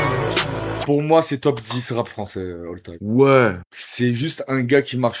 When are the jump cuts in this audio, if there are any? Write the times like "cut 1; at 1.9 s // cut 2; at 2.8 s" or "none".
cut 1; at 0.8 s // cut 2; at 1.4 s